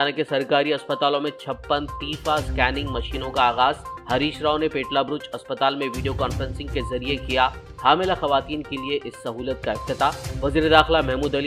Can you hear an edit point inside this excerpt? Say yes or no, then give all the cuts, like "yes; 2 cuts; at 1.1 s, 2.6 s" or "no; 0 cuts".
no; 0 cuts